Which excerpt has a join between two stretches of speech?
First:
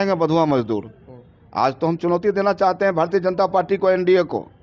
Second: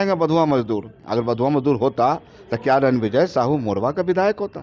second; 1 cut; at 1.0 s

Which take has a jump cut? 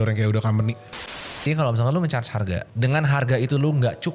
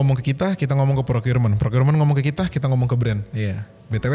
first; 2 cuts; at 1.3 s, 2.7 s

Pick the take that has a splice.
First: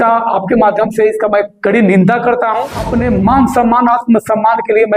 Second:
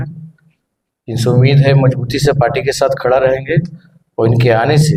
first; 1 cut; at 2.8 s

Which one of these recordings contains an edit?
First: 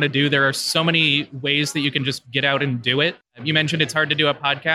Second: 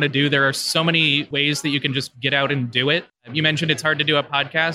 second; 1 cut; at 1.3 s

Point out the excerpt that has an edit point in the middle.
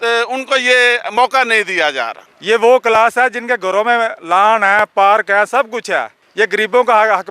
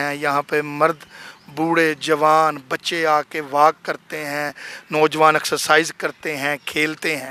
first; 2 cuts; at 2.3 s, 6.2 s

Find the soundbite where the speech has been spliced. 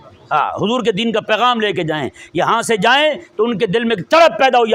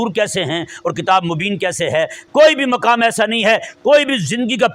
second; 1 cut; at 2.2 s

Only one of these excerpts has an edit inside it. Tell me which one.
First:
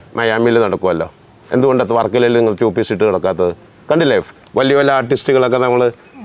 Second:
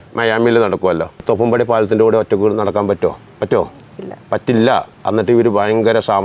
second; 3 cuts; at 1.2 s, 3.3 s, 4.9 s

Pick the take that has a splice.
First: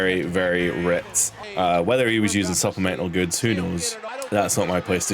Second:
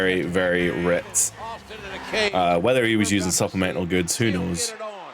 first; 2 cuts; at 1.5 s, 4.2 s

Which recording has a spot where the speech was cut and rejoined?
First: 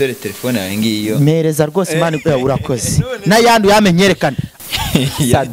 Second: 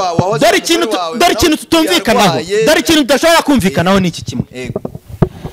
first; 1 cut; at 4.5 s

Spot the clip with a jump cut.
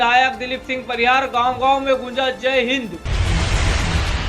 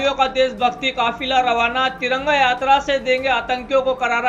first; 1 cut; at 3.1 s

